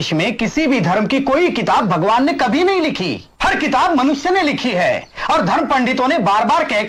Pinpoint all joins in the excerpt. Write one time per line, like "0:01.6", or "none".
none